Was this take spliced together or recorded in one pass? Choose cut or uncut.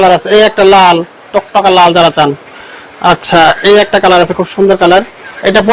uncut